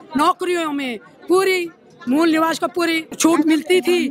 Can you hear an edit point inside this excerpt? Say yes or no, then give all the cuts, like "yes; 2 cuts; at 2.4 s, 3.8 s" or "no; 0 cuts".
yes; 1 cut; at 3.1 s